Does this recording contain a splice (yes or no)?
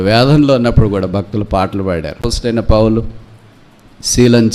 no